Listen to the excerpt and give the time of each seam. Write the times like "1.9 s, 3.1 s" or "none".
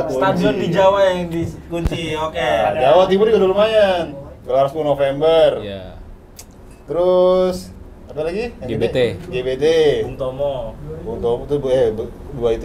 none